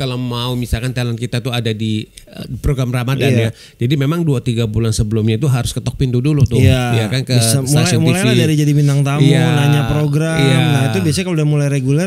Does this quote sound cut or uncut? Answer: uncut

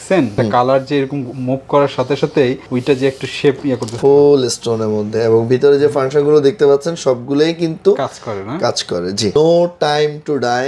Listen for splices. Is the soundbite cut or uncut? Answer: cut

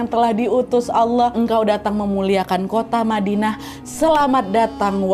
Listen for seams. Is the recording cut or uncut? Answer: cut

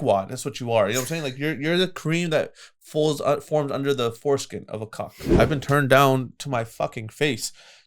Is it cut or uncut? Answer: cut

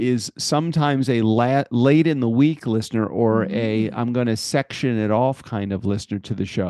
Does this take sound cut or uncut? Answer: uncut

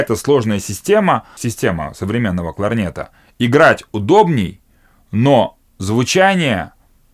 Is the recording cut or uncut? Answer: cut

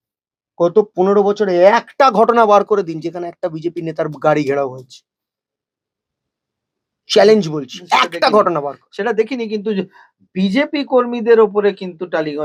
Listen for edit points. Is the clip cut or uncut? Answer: uncut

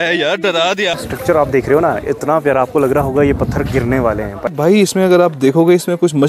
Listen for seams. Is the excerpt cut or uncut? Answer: cut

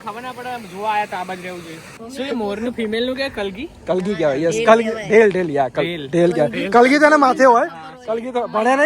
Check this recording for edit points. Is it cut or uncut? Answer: cut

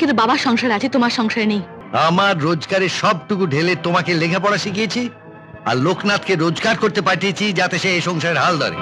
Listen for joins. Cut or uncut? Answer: cut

